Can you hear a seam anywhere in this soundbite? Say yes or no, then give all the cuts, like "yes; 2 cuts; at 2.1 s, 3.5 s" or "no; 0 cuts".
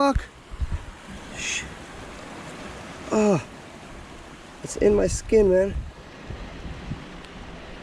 no; 0 cuts